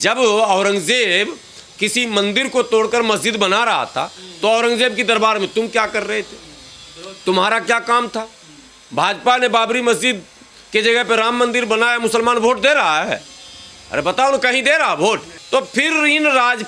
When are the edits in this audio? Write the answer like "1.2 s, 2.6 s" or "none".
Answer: 15.3 s